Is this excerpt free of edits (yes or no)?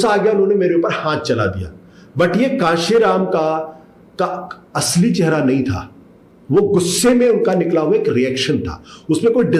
yes